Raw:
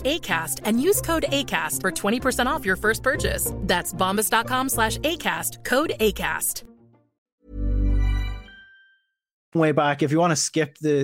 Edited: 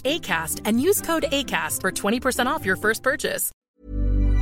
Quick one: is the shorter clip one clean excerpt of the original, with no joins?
no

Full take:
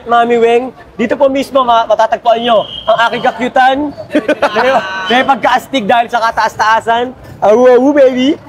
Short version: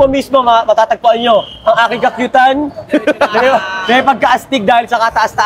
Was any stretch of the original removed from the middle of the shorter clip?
no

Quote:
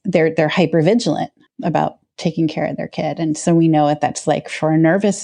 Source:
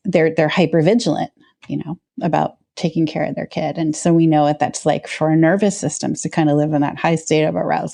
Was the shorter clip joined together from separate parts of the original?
yes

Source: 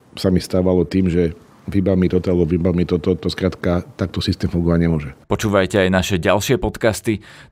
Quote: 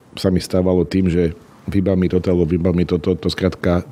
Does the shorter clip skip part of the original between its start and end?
no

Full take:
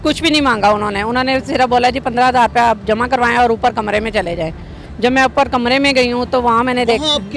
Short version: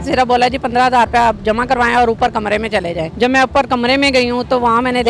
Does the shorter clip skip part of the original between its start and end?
yes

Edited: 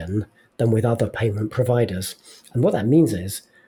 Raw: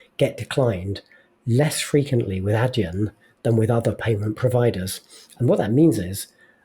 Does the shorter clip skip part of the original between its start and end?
no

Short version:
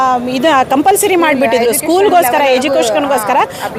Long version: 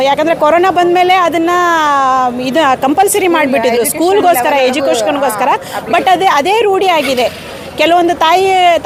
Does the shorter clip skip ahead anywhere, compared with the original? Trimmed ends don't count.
no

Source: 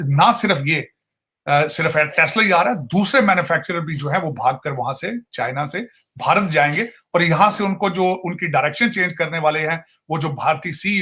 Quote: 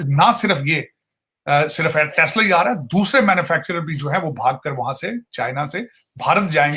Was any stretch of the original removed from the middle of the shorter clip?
no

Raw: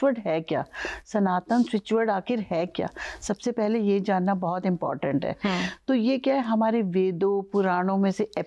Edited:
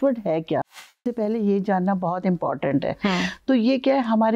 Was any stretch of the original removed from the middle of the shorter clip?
yes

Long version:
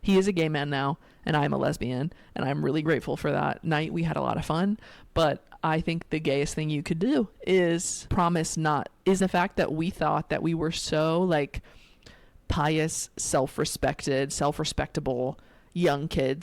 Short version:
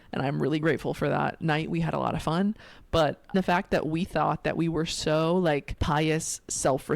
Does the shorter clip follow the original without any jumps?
no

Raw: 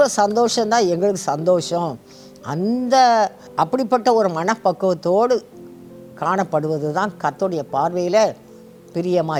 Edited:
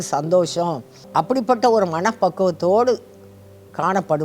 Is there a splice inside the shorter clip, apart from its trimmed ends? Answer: yes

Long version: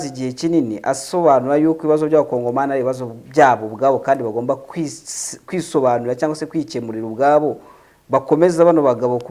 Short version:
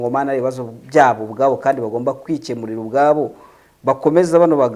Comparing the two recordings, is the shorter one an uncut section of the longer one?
no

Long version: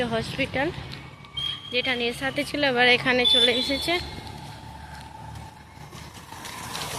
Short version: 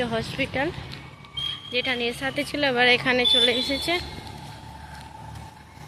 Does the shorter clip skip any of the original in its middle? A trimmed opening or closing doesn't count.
no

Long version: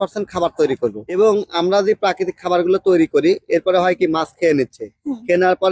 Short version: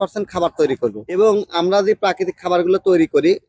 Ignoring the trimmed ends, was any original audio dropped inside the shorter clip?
no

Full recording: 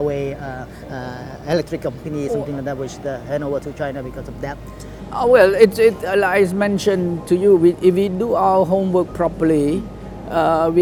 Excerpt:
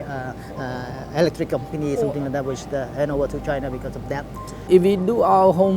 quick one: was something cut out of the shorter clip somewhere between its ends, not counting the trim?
yes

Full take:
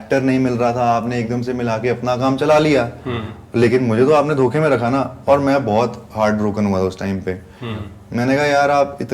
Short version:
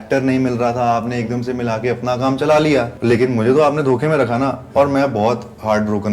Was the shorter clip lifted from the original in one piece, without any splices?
no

